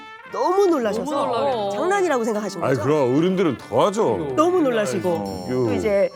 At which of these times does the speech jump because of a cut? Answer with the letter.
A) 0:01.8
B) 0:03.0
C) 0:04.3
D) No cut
D